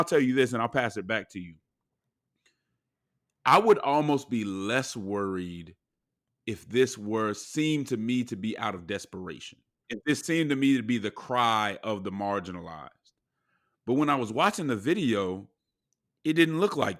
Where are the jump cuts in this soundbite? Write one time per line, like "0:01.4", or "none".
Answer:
0:09.8